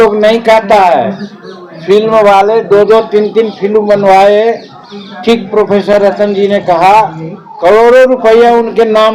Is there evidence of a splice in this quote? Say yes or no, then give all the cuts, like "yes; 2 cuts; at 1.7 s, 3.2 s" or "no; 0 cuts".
no; 0 cuts